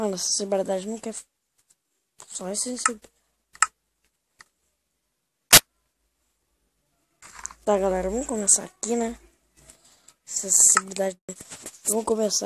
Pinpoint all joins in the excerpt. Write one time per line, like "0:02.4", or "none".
0:11.4